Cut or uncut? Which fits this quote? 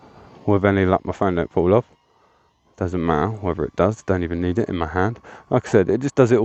uncut